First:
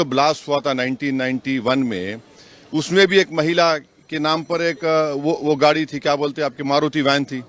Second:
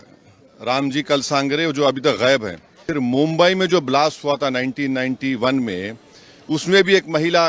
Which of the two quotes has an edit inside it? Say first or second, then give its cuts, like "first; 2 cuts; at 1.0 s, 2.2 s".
second; 1 cut; at 2.9 s